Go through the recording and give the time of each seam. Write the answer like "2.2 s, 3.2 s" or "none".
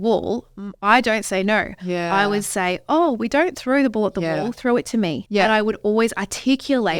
5.2 s